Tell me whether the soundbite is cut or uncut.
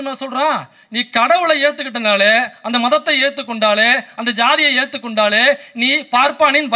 uncut